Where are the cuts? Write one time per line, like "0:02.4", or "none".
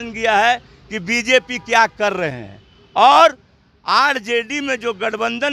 none

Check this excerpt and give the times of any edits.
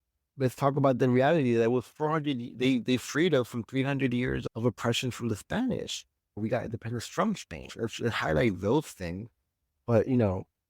0:06.4

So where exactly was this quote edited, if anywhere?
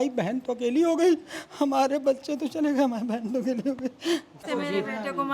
0:04.4

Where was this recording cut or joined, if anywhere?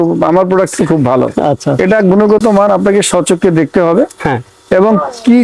none

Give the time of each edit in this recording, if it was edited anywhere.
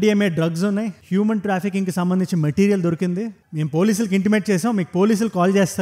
none

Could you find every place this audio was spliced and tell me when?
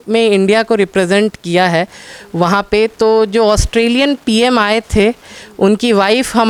none

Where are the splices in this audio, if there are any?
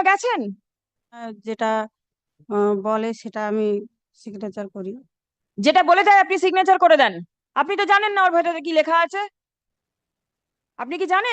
0:01.3

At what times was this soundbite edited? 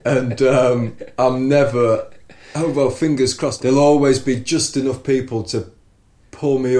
0:03.5

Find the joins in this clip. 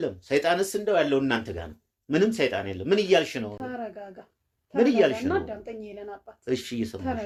none

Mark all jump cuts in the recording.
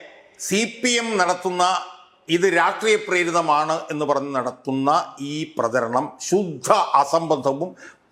none

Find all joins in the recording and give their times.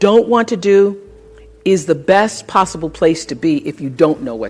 none

